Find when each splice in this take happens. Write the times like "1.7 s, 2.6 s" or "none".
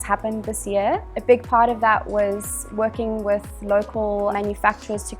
1.1 s, 4.3 s